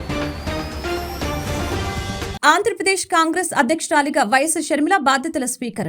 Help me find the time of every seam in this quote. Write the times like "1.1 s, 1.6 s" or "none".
none